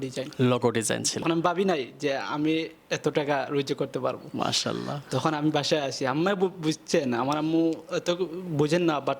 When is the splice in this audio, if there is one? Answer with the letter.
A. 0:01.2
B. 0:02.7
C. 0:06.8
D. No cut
A